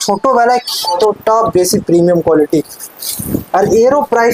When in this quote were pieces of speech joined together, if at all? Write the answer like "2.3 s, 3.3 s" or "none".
1.0 s